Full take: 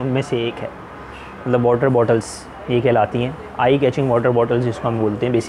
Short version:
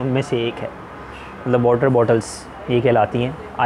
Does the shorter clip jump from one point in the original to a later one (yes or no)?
no